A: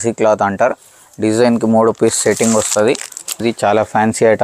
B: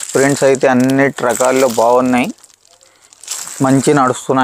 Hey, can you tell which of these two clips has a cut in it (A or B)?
A